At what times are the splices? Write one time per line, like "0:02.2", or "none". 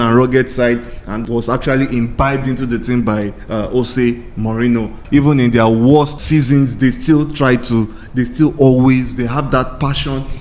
0:05.0
0:06.2